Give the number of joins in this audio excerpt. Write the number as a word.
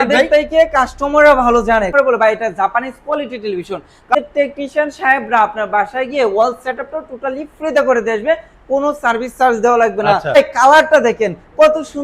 three